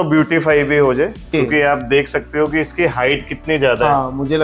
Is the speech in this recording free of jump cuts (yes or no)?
no